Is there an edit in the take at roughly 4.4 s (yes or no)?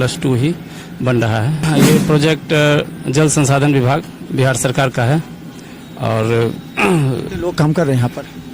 no